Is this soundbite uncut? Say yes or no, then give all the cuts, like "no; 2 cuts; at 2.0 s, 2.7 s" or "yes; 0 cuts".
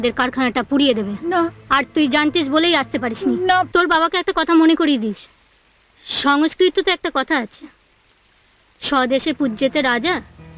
no; 1 cut; at 3.7 s